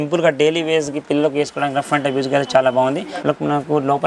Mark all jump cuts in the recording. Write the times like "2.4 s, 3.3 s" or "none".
3.1 s